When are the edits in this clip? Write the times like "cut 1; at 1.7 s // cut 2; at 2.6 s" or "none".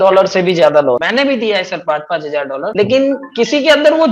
cut 1; at 1.0 s